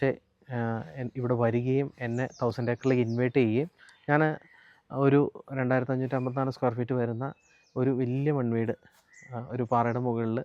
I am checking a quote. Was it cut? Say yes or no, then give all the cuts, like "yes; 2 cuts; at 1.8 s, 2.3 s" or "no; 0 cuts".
no; 0 cuts